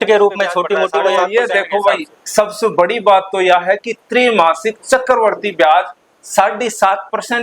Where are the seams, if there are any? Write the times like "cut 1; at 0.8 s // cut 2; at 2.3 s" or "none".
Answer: cut 1; at 0.9 s